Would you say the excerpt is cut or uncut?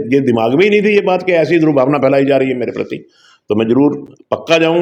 uncut